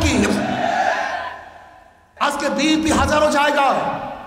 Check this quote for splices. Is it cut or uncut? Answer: cut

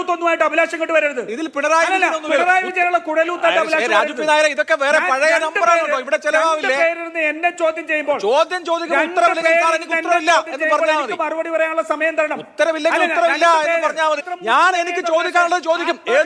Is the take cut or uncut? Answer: cut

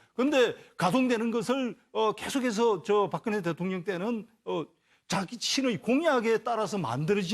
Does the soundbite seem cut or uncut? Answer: cut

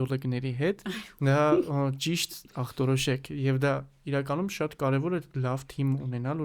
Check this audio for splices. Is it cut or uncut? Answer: uncut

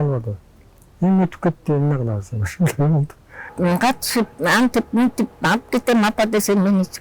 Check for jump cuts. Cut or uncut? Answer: cut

